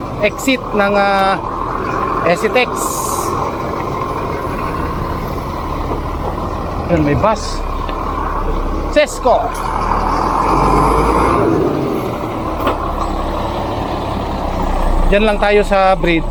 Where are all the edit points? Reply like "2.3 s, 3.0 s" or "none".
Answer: none